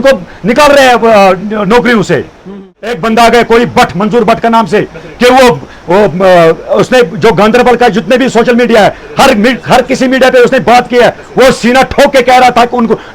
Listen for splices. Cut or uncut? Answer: cut